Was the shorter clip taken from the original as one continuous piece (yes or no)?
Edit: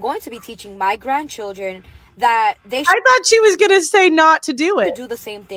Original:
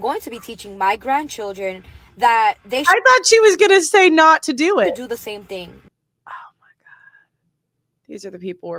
yes